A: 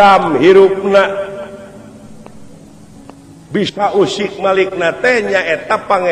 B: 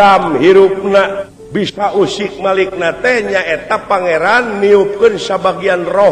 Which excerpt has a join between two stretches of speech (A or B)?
B